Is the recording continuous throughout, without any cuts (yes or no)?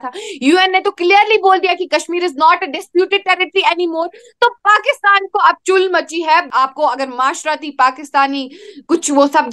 no